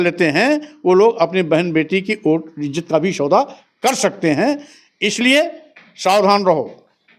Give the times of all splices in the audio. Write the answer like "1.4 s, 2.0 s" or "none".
none